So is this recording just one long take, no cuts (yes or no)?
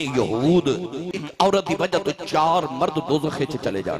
no